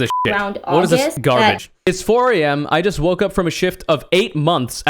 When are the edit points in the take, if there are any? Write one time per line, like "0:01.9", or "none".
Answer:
0:01.2